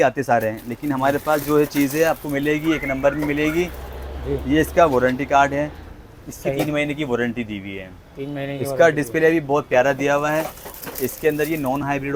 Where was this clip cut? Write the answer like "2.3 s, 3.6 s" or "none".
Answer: none